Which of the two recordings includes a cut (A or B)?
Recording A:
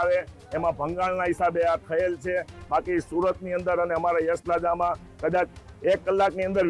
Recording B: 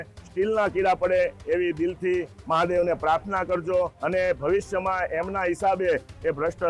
B